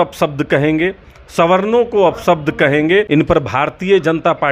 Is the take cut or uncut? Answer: cut